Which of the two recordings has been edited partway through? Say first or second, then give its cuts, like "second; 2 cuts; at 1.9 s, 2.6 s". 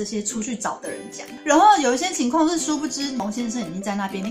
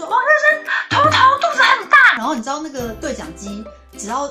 first; 1 cut; at 3.2 s